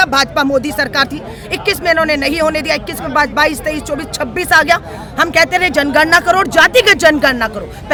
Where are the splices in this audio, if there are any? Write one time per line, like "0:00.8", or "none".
none